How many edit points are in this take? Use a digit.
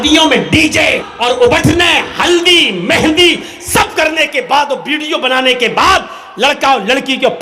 1